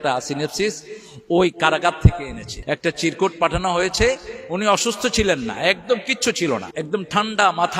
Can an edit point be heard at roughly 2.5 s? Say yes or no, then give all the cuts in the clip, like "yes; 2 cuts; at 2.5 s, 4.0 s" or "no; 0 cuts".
yes; 2 cuts; at 2.5 s, 6.7 s